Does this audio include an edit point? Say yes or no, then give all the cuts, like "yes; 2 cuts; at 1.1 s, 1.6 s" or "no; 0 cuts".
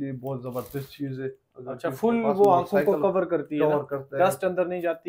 no; 0 cuts